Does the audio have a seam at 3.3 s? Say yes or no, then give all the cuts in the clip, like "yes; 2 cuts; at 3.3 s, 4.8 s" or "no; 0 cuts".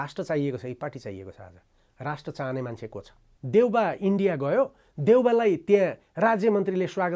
yes; 1 cut; at 3.3 s